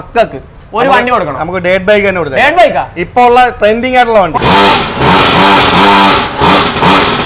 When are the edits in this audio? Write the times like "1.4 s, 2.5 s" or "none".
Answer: 4.3 s